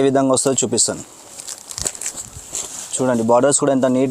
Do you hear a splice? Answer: yes; 1 cut; at 2.8 s

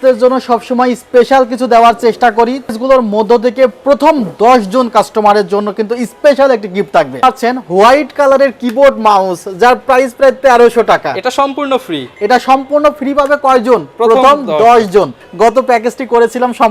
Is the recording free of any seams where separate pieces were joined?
no; 3 cuts; at 2.7 s, 7.2 s, 15.2 s

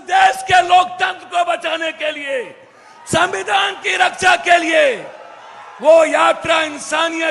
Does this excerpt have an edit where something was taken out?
no; 0 cuts

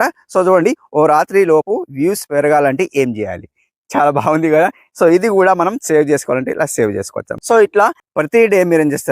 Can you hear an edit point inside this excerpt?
yes; 1 cut; at 7.3 s

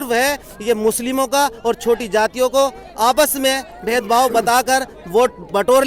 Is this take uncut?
yes; 0 cuts

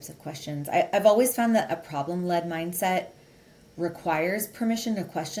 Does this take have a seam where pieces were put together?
no; 0 cuts

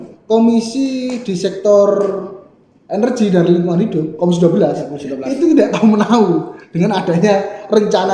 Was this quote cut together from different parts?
no; 0 cuts

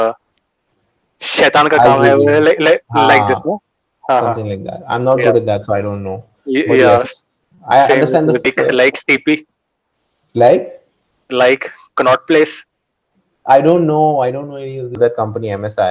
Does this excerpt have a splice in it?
yes; 2 cuts; at 8.5 s, 15.0 s

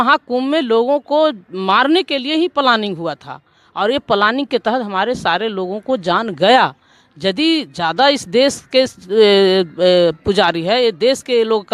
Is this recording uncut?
yes; 0 cuts

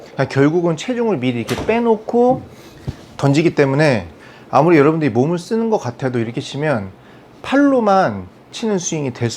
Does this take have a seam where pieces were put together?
no; 0 cuts

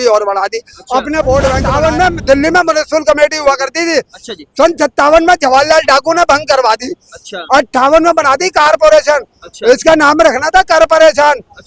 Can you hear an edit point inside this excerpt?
yes; 1 cut; at 1.7 s

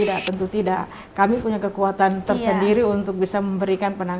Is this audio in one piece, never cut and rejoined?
yes; 0 cuts

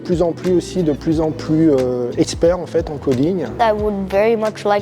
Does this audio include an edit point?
yes; 1 cut; at 3.5 s

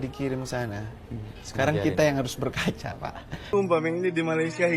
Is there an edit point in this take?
yes; 1 cut; at 3.4 s

